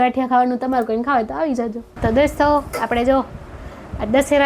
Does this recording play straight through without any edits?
no; 1 cut; at 1.9 s

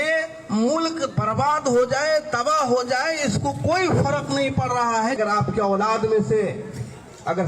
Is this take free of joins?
no; 1 cut; at 5.2 s

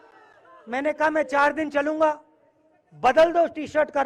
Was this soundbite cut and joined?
no; 0 cuts

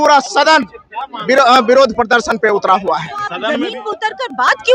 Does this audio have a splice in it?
yes; 1 cut; at 3.4 s

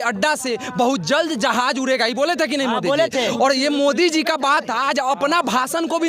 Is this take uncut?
yes; 0 cuts

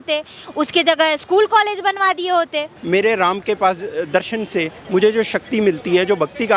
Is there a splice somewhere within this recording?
yes; 1 cut; at 2.7 s

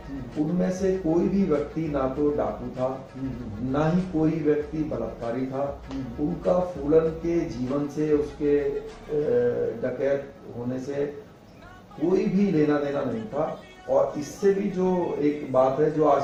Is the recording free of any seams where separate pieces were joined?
yes; 0 cuts

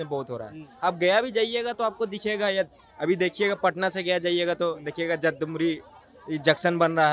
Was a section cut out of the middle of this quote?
no; 0 cuts

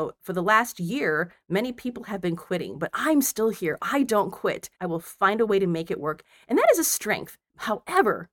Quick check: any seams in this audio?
yes; 2 cuts; at 4.7 s, 7.4 s

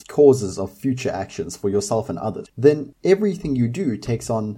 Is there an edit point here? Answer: no; 0 cuts

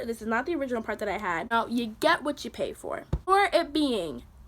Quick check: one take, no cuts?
no; 2 cuts; at 1.5 s, 3.2 s

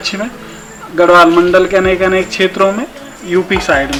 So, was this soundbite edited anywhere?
no; 0 cuts

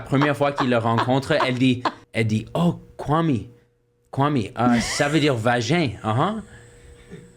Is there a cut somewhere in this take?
yes; 1 cut; at 2.0 s

